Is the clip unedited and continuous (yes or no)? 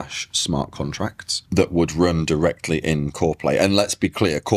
yes